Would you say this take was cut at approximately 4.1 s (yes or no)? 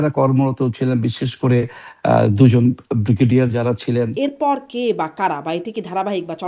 yes